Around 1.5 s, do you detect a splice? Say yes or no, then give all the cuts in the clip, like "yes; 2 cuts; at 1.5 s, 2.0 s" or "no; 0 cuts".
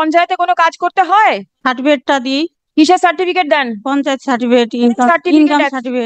yes; 1 cut; at 1.5 s